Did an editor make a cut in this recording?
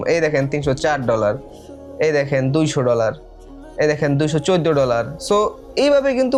no; 0 cuts

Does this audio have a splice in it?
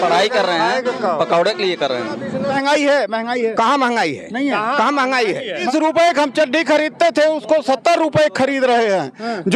yes; 2 cuts; at 2.5 s, 5.6 s

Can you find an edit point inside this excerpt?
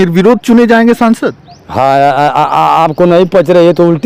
no; 0 cuts

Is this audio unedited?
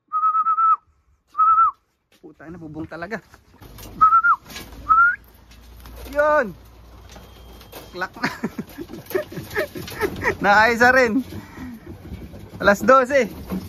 yes; 0 cuts

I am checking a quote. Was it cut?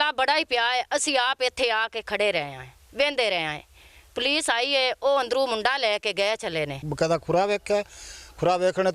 yes; 1 cut; at 6.9 s

